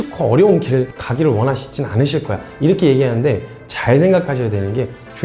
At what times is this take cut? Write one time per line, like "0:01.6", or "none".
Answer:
0:01.0